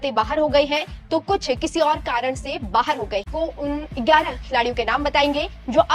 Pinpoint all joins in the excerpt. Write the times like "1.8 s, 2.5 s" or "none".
3.3 s